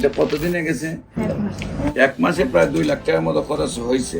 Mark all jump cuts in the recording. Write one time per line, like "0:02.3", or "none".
0:01.2